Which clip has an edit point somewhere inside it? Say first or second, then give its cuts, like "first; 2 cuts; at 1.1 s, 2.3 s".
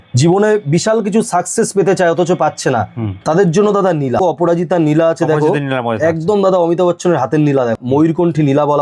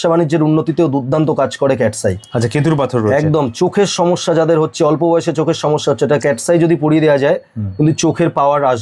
first; 2 cuts; at 4.2 s, 7.8 s